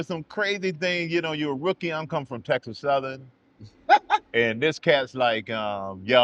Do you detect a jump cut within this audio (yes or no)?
no